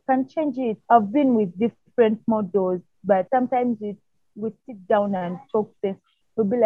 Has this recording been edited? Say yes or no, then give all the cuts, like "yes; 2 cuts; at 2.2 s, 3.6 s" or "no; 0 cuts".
yes; 2 cuts; at 0.8 s, 3.3 s